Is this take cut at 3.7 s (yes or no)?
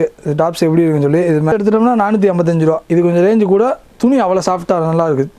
no